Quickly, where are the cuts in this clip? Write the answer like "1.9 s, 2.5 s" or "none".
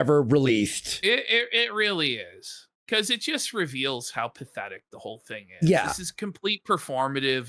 none